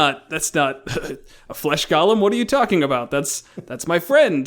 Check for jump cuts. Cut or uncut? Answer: uncut